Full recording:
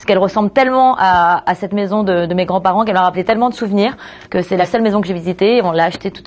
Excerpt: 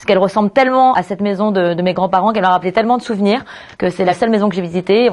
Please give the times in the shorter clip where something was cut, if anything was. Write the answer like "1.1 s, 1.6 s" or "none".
1.0 s